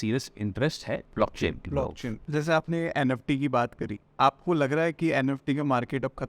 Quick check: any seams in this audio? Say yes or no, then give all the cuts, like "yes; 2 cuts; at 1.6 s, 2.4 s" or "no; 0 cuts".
yes; 3 cuts; at 1.1 s, 2.2 s, 4.0 s